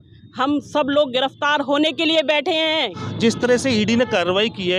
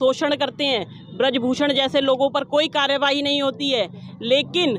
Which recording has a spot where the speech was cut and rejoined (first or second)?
first